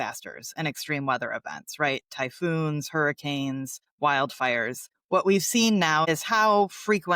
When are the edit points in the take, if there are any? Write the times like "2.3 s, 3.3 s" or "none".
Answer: 6.0 s

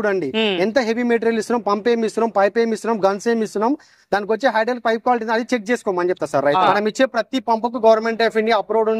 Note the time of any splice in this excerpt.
6.7 s

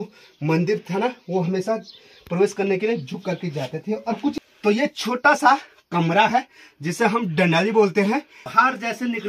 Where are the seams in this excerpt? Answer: 4.3 s, 8.4 s

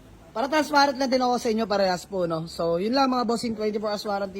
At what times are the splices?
none

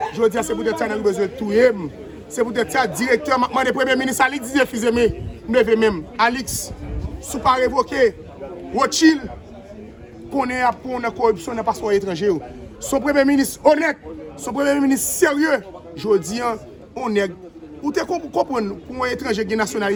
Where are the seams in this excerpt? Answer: none

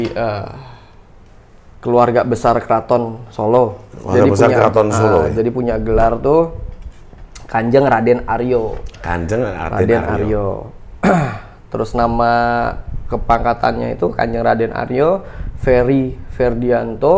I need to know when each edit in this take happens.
none

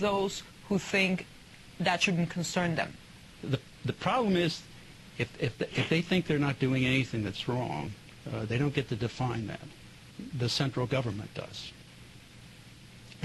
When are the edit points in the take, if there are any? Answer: none

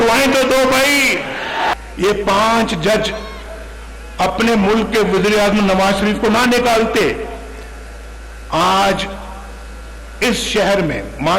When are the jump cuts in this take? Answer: 1.7 s

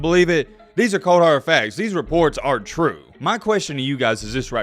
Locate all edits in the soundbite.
3.1 s

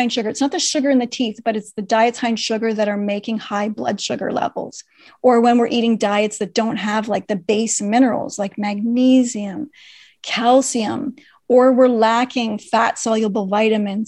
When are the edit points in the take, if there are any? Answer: none

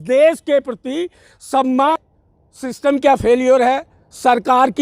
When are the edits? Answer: 2.4 s

